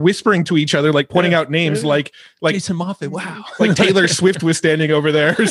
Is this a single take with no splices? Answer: yes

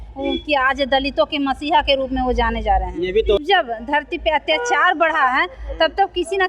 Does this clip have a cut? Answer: yes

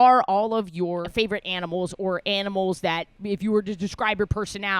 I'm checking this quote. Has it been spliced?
yes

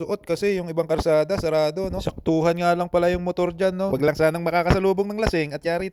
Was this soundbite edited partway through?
no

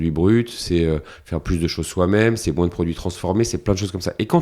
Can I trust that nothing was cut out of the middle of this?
yes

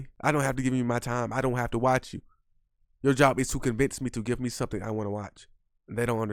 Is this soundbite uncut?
yes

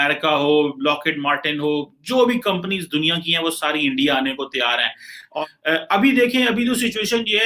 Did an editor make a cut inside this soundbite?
yes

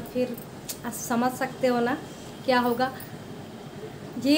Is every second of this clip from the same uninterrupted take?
yes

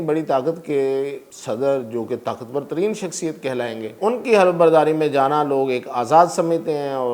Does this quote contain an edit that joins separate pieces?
yes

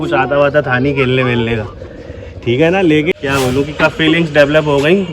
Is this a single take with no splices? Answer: no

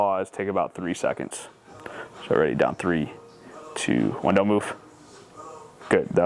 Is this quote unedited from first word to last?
yes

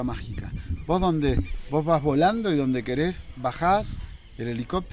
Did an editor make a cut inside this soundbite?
no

